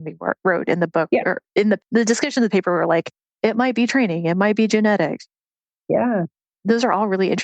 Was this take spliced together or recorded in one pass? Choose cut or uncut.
cut